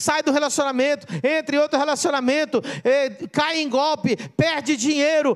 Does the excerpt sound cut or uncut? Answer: uncut